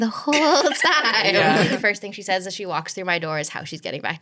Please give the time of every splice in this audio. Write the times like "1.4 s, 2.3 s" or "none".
1.7 s